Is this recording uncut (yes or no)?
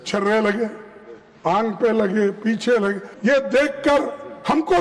no